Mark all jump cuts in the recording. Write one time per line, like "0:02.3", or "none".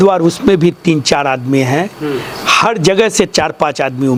none